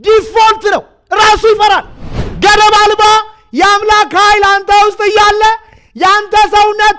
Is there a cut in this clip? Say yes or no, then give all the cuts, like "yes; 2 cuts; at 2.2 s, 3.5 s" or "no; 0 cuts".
yes; 1 cut; at 2.0 s